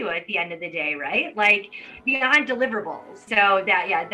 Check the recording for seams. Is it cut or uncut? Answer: cut